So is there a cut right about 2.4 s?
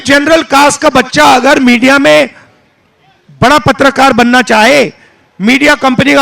no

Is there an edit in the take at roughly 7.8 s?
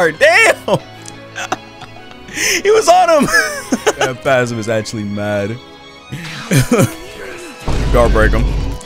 no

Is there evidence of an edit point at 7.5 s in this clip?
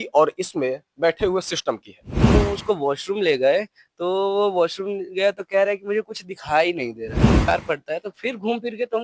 yes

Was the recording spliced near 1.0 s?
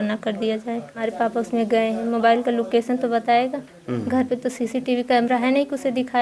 yes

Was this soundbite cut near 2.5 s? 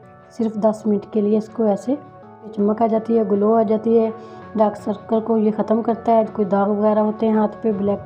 yes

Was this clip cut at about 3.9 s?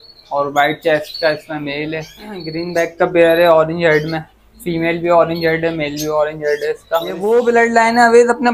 no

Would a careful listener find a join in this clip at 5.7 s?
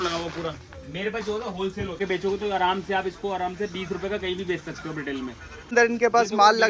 yes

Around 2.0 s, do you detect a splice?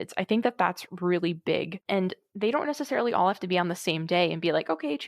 yes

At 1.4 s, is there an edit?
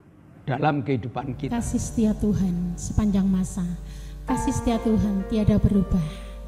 yes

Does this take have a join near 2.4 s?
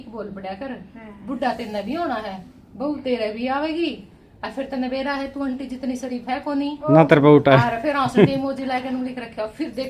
no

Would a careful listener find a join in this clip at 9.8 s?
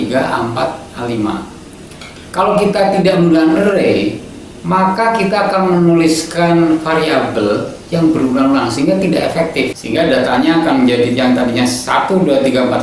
yes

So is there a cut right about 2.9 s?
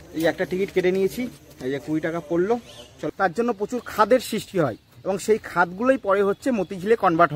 yes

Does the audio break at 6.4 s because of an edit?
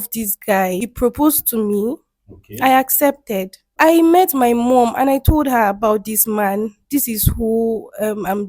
no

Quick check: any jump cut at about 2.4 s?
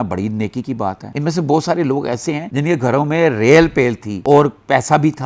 yes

